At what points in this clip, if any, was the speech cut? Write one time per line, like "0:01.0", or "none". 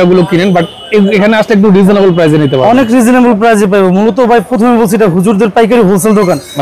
none